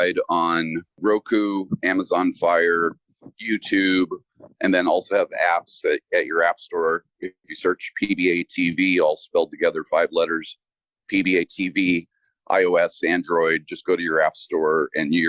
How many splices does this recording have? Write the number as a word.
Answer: one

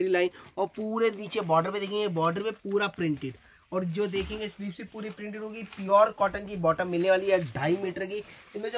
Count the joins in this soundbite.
zero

